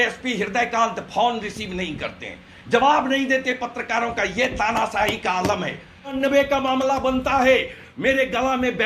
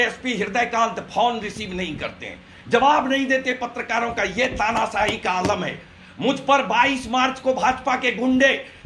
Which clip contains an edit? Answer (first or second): first